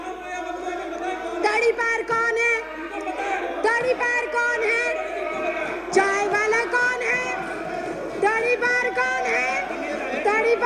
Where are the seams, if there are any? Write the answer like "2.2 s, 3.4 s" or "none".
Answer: none